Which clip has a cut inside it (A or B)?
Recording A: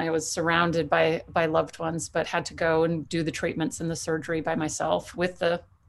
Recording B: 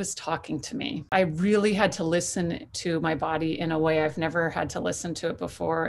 B